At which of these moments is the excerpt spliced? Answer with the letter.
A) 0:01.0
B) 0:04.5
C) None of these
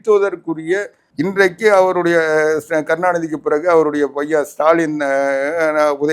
A